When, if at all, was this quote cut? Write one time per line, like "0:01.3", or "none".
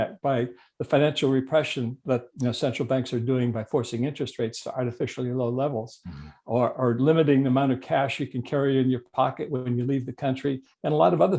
none